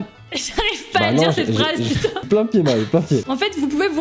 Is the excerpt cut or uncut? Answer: uncut